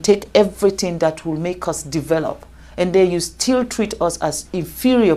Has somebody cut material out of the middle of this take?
no; 0 cuts

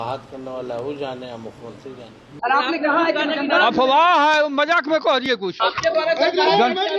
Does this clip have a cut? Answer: yes; 2 cuts; at 2.2 s, 5.5 s

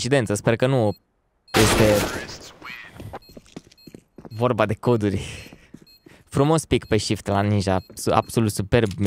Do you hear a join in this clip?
no; 0 cuts

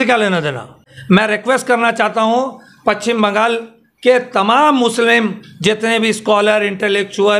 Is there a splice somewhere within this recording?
yes; 1 cut; at 0.9 s

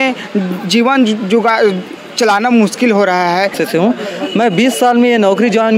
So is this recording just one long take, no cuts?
no; 1 cut; at 3.6 s

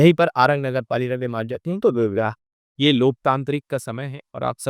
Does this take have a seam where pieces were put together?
no; 0 cuts

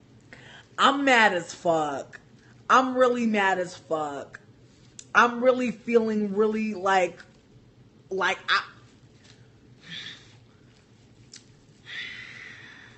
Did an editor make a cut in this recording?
no; 0 cuts

